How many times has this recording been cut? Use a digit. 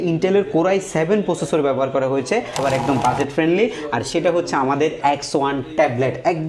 1